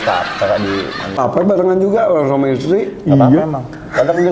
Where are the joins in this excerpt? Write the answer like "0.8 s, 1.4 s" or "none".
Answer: 1.2 s